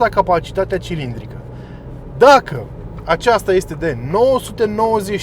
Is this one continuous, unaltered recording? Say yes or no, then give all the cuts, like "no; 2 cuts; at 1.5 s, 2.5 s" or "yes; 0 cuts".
yes; 0 cuts